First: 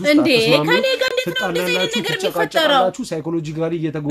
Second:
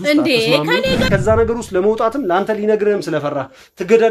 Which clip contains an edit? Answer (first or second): second